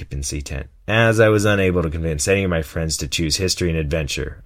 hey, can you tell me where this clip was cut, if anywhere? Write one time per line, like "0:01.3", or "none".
none